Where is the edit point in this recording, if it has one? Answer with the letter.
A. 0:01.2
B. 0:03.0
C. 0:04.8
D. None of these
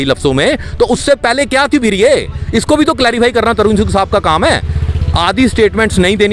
D